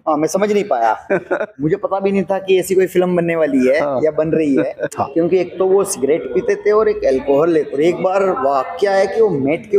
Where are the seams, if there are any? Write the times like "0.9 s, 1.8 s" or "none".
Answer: 1.5 s, 4.8 s, 7.7 s